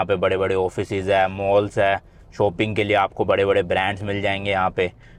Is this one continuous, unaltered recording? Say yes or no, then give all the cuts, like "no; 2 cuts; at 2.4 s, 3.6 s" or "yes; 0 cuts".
yes; 0 cuts